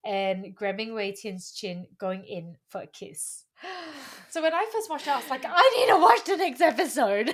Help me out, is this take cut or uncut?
uncut